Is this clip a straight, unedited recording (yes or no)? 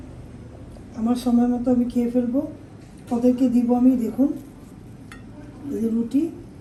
yes